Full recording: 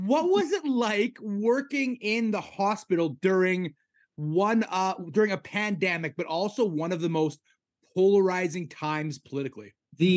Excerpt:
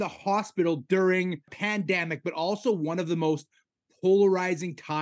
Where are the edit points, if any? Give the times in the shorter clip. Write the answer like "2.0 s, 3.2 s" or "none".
1.6 s